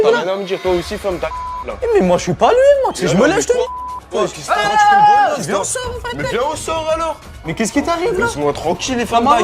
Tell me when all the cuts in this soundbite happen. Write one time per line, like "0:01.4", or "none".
0:08.1